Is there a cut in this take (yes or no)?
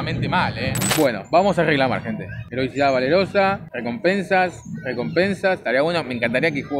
yes